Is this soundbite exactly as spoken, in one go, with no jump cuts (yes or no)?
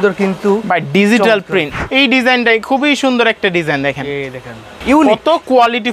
no